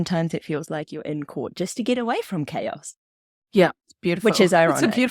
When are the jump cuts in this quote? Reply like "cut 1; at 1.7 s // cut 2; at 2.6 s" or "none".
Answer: none

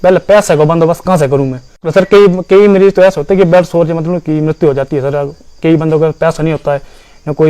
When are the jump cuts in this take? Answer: cut 1; at 1.8 s

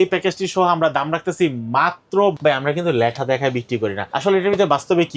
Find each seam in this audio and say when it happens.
cut 1; at 2.4 s // cut 2; at 4.1 s

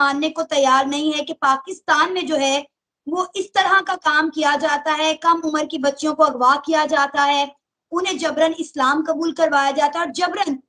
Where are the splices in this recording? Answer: none

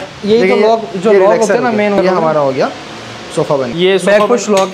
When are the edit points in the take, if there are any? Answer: cut 1; at 2.0 s // cut 2; at 3.7 s

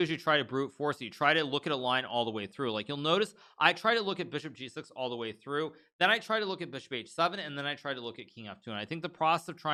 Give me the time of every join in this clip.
none

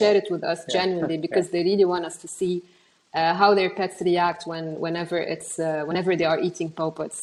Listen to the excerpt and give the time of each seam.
none

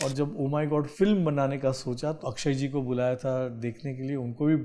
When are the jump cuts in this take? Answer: cut 1; at 0.9 s // cut 2; at 2.2 s

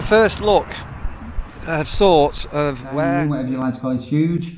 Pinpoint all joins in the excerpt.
cut 1; at 3.1 s

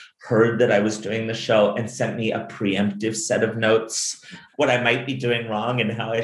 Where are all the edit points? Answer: cut 1; at 4.4 s

